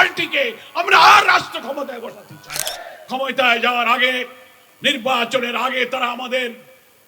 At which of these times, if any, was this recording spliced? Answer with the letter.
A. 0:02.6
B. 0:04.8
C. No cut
A